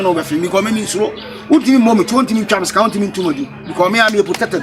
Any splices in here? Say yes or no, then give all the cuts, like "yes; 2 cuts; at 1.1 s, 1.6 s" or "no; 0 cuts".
no; 0 cuts